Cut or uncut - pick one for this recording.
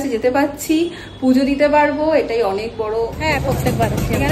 cut